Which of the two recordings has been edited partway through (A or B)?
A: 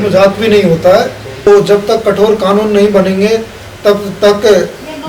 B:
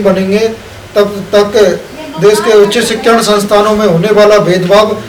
A